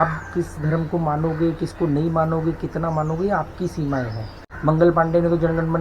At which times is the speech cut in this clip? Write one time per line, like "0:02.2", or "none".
0:04.5